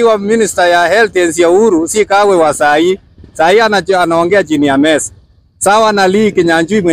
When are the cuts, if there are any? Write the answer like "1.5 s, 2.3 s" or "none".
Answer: none